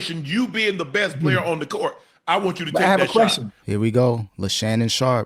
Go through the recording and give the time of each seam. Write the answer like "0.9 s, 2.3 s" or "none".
3.6 s, 4.3 s